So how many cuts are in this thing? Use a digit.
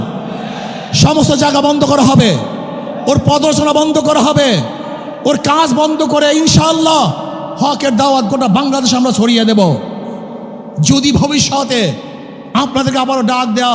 0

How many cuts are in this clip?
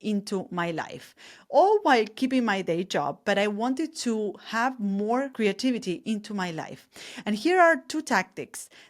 1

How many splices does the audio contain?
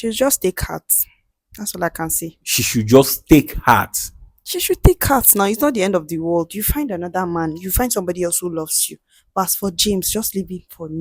0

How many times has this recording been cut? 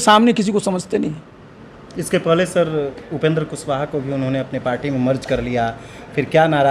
0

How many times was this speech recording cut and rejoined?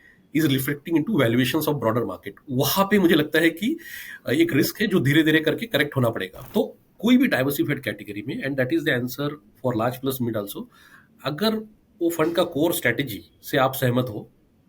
1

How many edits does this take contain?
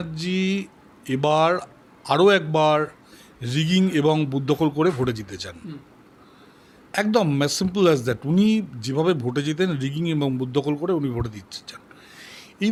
0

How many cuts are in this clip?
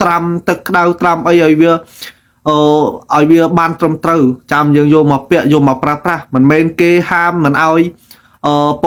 0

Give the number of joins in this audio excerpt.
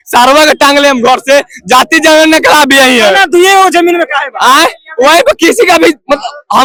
0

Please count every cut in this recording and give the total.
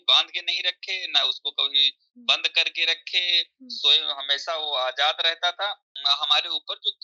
1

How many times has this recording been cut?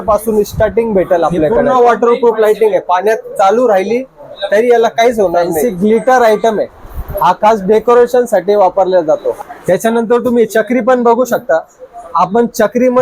3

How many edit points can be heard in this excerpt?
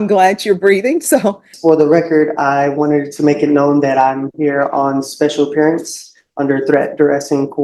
1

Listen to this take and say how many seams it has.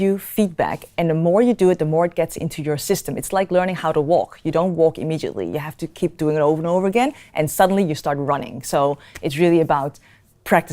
0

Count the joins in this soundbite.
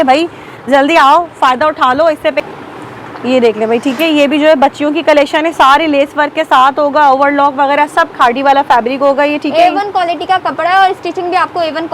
1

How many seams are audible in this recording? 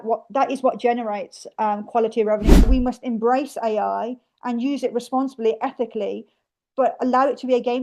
1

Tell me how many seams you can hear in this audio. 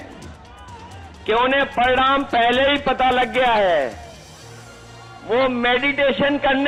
0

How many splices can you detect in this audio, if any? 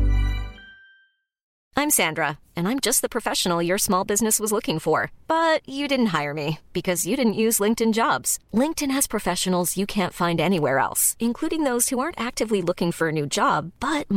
1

